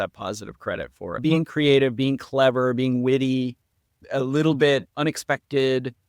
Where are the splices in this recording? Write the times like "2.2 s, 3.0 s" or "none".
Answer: 1.2 s